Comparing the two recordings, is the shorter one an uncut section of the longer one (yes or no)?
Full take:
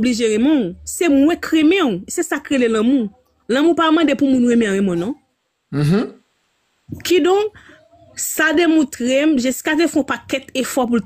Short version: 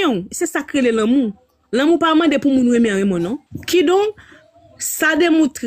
no